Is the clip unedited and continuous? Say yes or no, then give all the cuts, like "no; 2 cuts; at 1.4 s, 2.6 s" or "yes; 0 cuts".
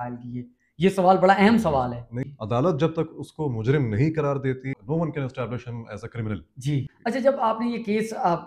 no; 3 cuts; at 2.3 s, 4.8 s, 6.9 s